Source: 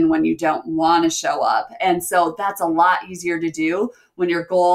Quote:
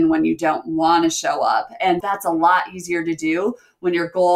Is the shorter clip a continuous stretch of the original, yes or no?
no